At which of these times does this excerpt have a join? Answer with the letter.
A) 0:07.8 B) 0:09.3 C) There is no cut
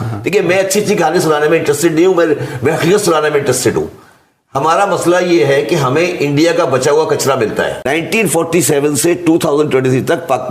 A